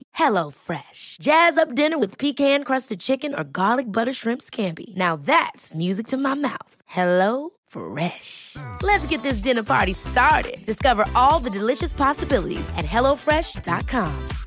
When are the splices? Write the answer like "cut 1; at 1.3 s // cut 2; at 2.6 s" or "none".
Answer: none